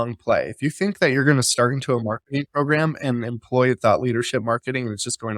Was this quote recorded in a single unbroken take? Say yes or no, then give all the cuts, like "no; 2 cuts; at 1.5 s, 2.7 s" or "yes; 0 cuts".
yes; 0 cuts